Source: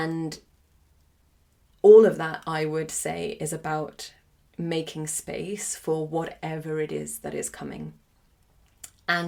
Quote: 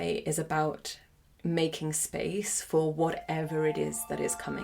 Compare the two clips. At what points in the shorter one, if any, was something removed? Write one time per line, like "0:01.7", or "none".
none